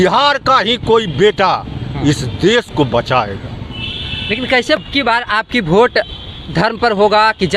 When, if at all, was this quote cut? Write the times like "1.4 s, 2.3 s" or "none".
4.8 s